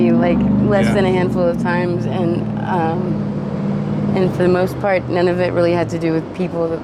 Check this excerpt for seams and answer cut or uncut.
uncut